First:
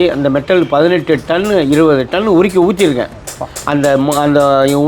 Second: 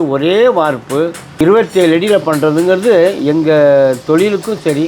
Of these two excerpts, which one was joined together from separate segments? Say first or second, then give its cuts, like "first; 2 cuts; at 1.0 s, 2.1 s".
second; 1 cut; at 1.4 s